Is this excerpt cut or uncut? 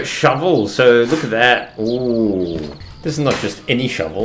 cut